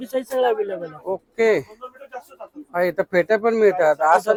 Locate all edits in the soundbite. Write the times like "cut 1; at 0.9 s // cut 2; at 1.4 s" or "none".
none